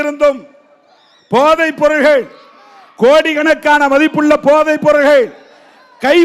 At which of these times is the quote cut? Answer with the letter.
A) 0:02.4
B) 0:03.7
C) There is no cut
C